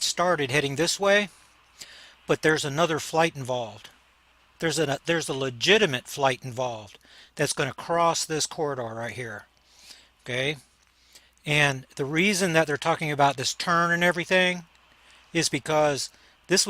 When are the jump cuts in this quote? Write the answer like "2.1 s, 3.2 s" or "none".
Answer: 4.7 s